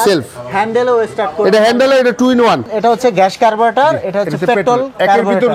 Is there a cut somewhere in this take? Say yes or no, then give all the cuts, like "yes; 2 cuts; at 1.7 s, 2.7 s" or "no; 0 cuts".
yes; 1 cut; at 2.7 s